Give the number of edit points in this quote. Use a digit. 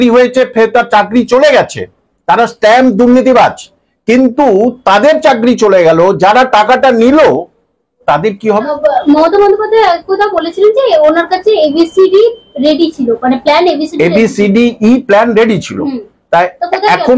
1